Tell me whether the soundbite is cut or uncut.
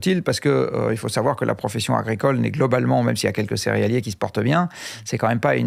uncut